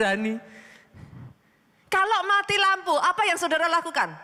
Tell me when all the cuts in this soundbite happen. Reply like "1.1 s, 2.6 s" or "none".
none